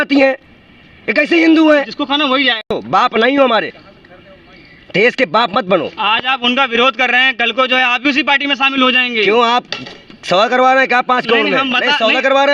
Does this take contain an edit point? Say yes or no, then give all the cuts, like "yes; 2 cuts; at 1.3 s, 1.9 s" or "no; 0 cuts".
yes; 1 cut; at 2.7 s